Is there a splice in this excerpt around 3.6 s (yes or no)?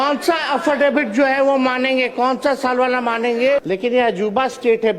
yes